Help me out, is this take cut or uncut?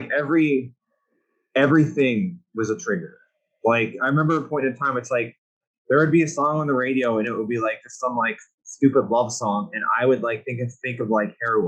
uncut